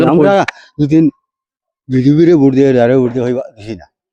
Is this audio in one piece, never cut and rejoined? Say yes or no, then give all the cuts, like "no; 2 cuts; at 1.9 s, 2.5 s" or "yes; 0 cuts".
yes; 0 cuts